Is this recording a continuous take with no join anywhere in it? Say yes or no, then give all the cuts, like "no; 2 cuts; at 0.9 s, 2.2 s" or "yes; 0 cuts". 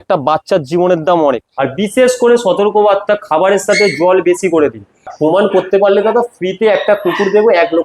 no; 2 cuts; at 1.5 s, 5.1 s